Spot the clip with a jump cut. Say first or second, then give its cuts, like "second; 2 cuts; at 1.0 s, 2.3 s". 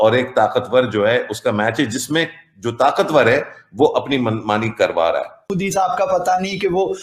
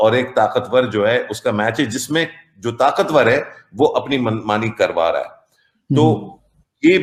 first; 1 cut; at 5.5 s